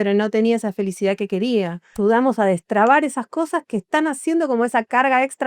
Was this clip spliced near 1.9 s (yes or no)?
yes